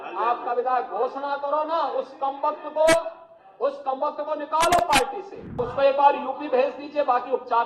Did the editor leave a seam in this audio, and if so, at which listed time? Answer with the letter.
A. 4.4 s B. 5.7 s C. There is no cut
B